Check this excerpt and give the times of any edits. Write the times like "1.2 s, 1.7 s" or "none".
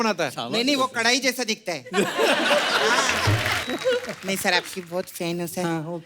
3.7 s